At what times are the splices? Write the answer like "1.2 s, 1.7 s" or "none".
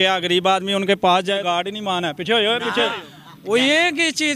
1.4 s